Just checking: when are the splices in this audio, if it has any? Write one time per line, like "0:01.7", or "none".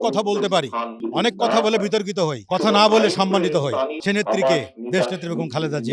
0:01.0
0:02.4
0:04.0